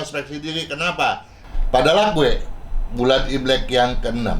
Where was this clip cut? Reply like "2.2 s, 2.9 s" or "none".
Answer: 1.3 s